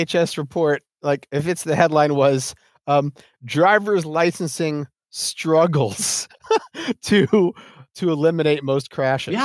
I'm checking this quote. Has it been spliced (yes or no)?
yes